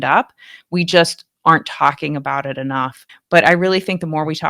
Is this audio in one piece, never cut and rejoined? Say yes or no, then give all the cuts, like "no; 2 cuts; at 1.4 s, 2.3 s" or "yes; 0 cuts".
no; 1 cut; at 3.1 s